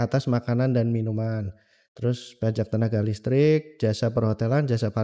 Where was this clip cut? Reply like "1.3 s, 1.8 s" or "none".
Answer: none

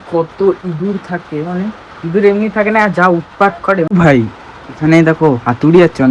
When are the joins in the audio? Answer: 3.9 s

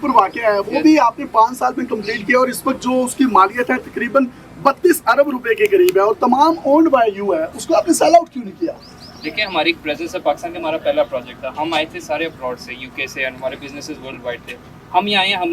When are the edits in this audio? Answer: none

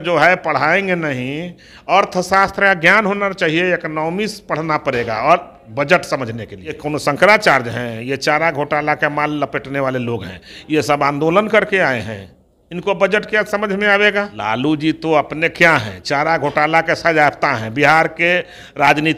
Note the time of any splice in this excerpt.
6.8 s, 14.3 s

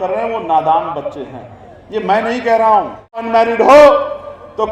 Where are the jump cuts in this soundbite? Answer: 3.2 s

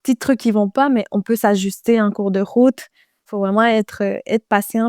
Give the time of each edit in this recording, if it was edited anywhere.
3.3 s

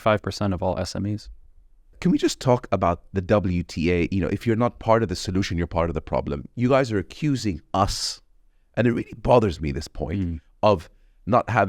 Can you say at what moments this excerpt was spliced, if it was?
2.0 s, 4.4 s

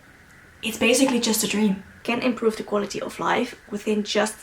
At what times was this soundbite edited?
1.9 s

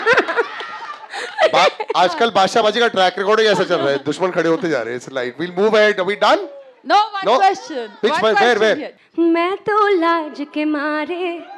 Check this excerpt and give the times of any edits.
8.9 s

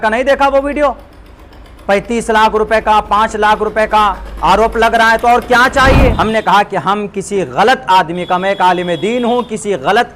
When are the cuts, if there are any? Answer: 6.1 s

